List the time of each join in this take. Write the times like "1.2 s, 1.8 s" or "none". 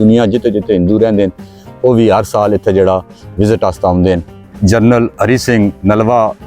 4.4 s, 5.1 s